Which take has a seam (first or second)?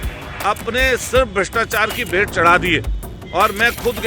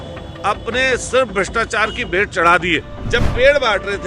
second